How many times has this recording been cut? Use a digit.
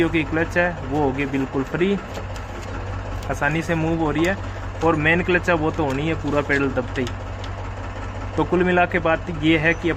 0